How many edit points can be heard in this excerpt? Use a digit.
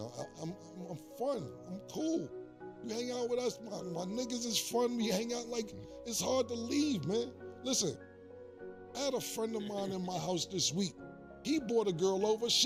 0